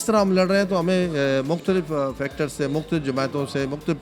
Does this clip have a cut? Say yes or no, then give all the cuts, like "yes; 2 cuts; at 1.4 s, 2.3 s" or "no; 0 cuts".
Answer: no; 0 cuts